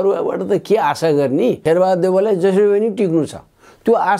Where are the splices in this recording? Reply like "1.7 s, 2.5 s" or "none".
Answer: 1.6 s